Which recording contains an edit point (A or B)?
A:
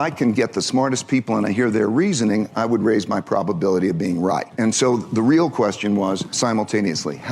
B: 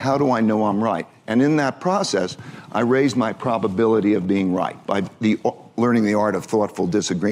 A